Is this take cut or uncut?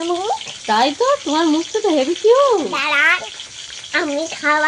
cut